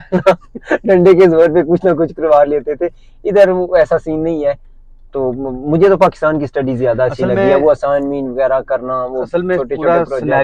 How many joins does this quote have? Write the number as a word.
zero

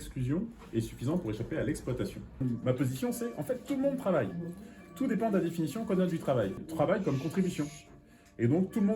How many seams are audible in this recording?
two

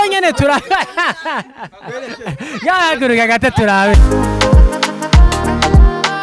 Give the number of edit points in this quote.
one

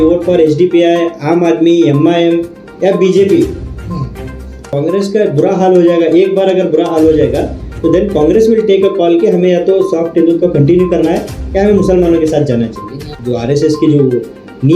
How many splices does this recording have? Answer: two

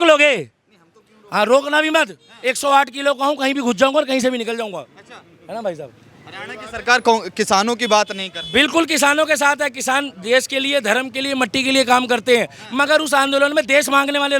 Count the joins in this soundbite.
zero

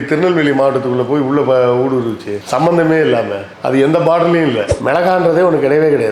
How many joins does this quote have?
one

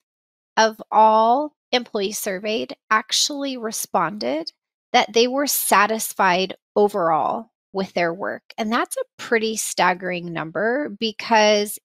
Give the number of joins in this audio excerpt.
one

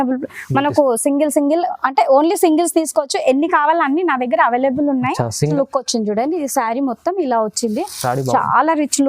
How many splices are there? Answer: one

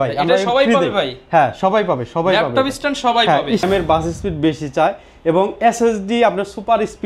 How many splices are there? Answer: one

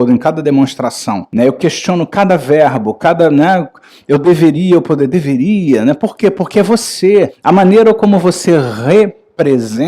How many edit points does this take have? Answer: two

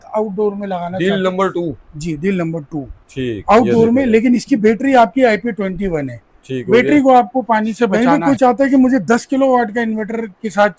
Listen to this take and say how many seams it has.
one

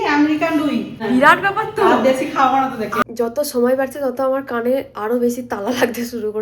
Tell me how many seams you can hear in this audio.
two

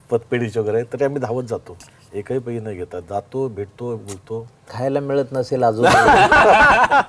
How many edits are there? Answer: one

